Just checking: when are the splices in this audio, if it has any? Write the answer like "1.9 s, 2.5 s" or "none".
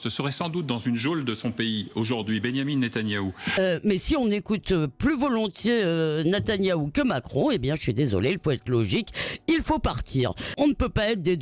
3.5 s, 10.5 s